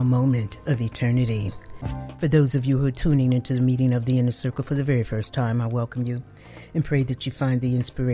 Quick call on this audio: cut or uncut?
cut